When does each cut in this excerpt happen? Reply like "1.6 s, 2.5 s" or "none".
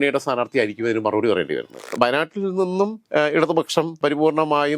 1.8 s, 3.0 s, 4.0 s